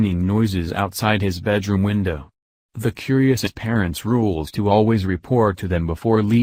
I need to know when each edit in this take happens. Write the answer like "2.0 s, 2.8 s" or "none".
none